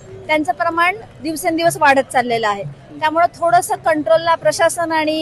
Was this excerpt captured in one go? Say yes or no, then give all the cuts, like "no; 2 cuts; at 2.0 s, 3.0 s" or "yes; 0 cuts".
yes; 0 cuts